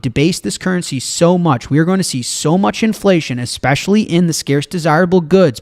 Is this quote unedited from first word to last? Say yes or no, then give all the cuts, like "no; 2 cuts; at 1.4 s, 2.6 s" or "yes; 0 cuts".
yes; 0 cuts